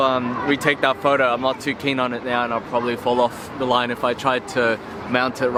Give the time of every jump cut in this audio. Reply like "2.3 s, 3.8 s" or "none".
none